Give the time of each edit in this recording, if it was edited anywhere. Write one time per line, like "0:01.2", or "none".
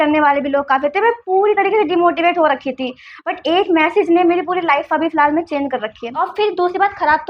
0:06.1